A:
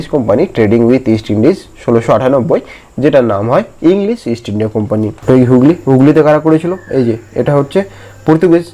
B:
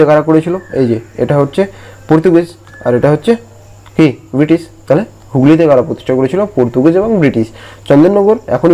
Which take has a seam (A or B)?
A